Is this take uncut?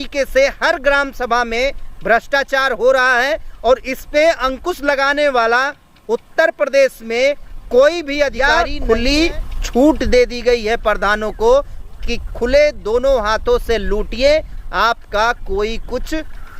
no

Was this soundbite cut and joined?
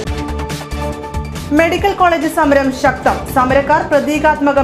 yes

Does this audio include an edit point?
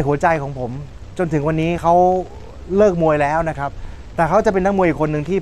no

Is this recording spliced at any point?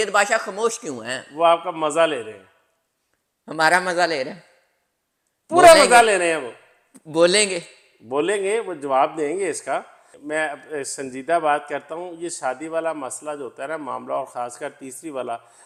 no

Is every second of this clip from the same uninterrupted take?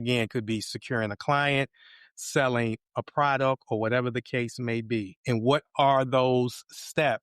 no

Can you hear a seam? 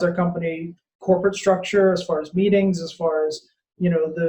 no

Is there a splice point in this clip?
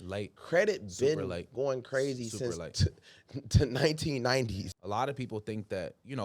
yes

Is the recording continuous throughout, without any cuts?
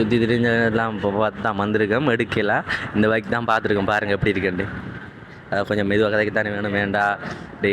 yes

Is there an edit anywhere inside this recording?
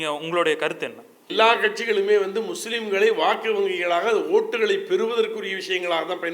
yes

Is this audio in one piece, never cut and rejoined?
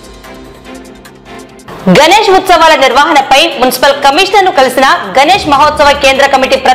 no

